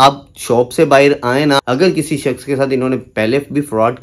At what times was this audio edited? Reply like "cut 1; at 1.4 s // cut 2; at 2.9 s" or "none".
cut 1; at 1.6 s